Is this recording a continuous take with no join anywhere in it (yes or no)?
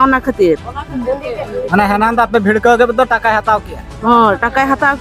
yes